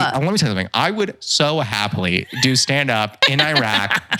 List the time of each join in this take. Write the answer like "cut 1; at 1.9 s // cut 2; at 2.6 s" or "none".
none